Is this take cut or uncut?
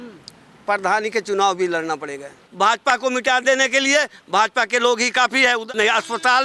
cut